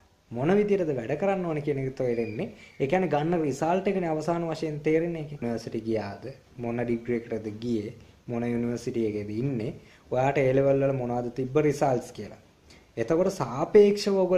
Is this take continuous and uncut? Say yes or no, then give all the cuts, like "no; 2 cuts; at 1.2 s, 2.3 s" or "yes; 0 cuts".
no; 1 cut; at 5.4 s